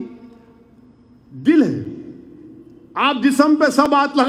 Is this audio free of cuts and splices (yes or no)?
yes